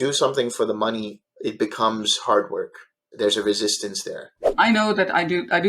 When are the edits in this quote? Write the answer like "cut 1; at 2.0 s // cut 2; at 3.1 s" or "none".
cut 1; at 1.1 s // cut 2; at 3.0 s // cut 3; at 4.5 s